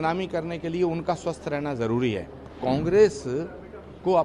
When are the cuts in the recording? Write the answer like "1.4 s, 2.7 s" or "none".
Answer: 2.5 s